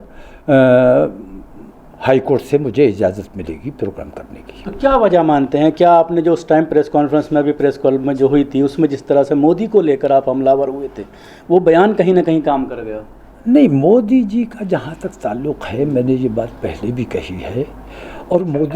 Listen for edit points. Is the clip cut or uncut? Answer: uncut